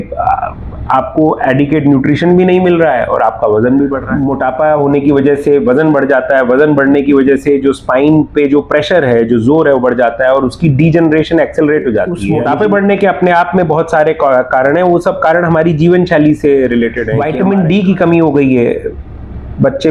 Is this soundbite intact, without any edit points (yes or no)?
no